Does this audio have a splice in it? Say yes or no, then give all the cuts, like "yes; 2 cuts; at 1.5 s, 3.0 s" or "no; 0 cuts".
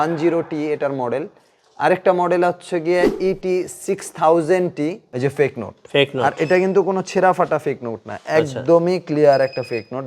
yes; 1 cut; at 5.0 s